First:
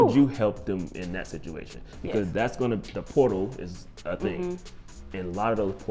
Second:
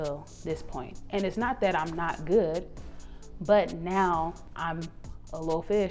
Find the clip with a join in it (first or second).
second